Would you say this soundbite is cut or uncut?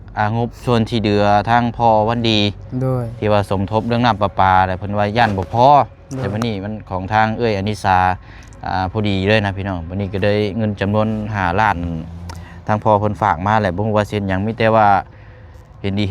uncut